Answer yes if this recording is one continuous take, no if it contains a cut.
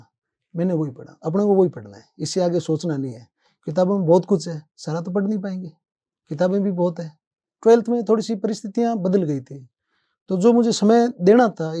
no